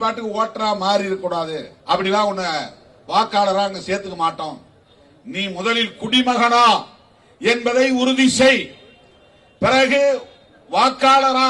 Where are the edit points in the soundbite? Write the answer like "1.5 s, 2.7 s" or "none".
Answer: 1.7 s